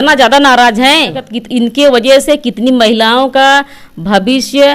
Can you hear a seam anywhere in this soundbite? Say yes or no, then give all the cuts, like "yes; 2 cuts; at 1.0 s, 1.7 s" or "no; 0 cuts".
yes; 1 cut; at 1.3 s